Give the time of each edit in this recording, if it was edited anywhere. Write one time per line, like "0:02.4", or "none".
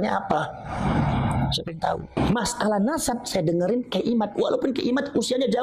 0:02.2